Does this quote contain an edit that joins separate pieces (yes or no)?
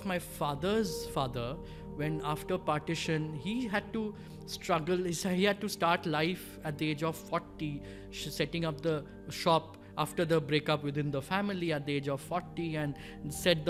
no